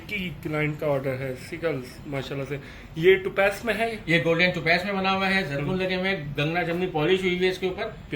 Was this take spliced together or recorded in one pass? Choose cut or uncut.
uncut